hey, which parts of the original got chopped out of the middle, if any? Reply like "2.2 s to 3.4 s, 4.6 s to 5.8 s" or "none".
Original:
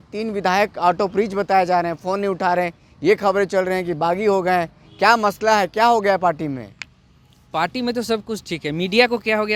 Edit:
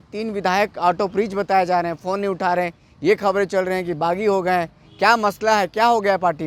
none